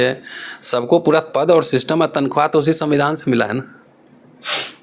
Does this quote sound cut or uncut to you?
uncut